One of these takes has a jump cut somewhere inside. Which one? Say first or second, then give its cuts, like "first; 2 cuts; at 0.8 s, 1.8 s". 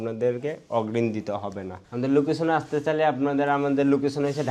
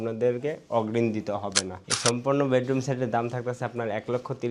second; 1 cut; at 1.9 s